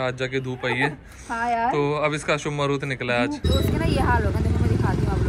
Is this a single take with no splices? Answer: no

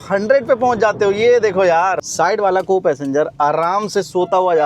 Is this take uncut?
no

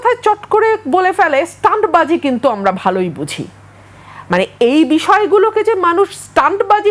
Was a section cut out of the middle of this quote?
no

